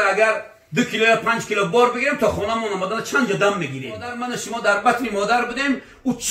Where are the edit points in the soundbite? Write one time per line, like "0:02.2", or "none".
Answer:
0:04.2